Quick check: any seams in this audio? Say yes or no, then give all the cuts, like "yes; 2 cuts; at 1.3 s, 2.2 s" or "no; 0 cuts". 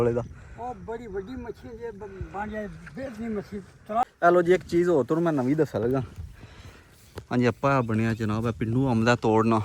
yes; 1 cut; at 4.0 s